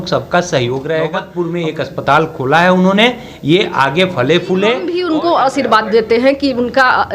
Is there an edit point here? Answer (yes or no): yes